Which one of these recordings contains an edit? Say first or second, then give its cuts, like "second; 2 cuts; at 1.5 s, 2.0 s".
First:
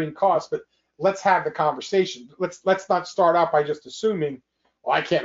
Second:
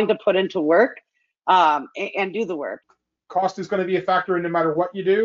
second; 1 cut; at 2.7 s